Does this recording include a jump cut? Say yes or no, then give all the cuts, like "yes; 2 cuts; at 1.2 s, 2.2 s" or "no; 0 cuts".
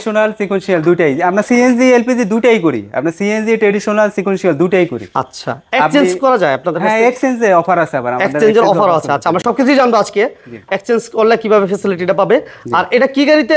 no; 0 cuts